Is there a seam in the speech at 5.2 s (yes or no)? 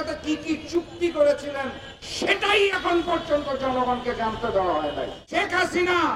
yes